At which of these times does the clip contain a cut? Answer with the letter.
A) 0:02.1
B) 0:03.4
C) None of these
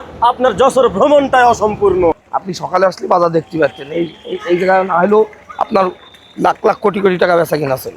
A